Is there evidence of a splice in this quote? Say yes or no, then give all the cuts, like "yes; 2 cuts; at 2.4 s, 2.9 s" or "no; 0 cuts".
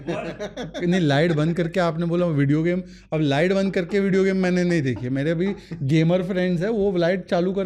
no; 0 cuts